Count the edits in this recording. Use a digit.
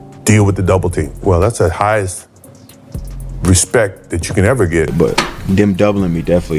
1